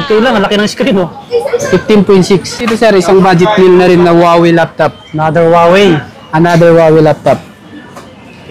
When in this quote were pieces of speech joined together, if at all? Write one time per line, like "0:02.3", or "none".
0:02.5